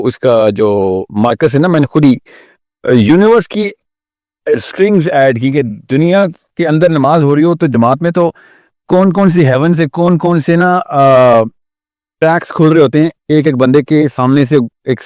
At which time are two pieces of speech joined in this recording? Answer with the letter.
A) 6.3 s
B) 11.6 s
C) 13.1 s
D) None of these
D